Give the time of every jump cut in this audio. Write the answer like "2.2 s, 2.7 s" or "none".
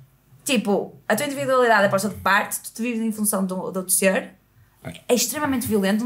none